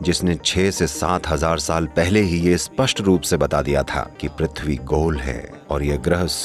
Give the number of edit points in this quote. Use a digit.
0